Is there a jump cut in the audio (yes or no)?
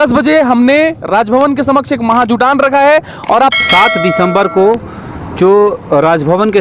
yes